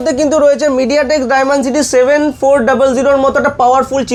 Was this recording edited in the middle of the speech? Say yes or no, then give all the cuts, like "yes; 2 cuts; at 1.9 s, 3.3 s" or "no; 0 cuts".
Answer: no; 0 cuts